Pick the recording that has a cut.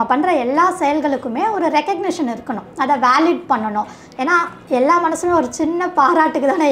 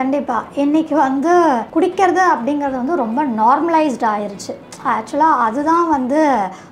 second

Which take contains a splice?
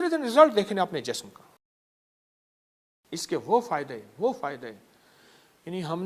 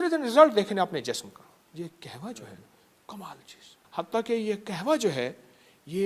second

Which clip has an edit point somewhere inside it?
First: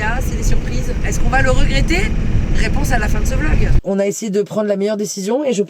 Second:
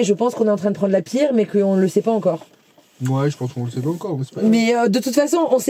first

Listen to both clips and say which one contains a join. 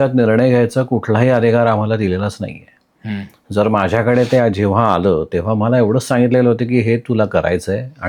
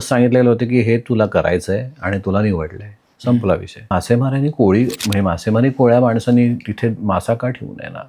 second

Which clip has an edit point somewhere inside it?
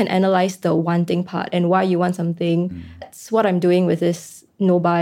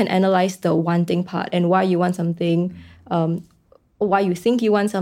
first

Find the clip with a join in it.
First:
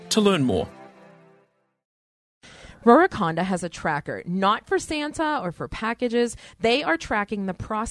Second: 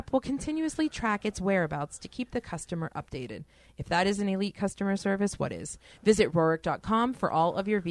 first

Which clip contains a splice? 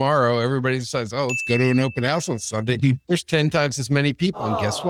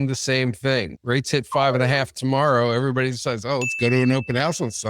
second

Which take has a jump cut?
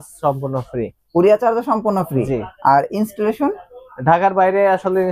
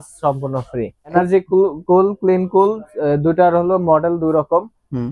second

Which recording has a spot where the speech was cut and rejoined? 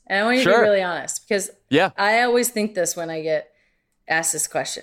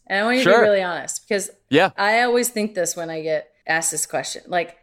second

